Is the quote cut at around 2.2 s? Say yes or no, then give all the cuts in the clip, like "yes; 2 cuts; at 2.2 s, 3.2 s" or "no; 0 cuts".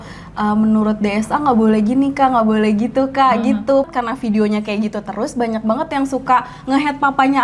no; 1 cut; at 3.9 s